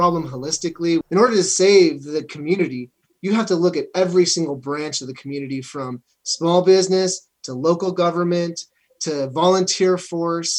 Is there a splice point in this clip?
yes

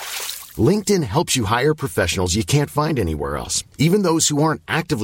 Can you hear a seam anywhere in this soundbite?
no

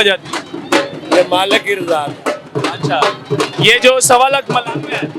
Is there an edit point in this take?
no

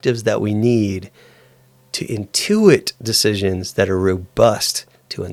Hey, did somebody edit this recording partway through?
no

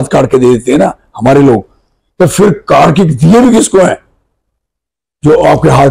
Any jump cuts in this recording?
no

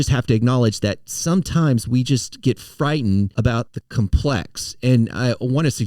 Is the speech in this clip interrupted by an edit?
yes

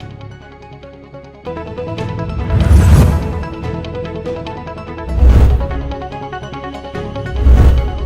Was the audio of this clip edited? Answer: yes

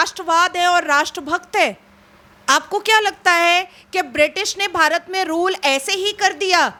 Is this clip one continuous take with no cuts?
yes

